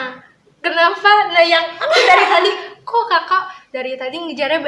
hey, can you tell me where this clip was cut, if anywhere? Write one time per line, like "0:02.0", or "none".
none